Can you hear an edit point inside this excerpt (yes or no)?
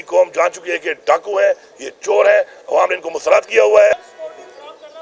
yes